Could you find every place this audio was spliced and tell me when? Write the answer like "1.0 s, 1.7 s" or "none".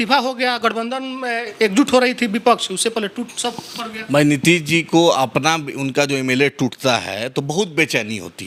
none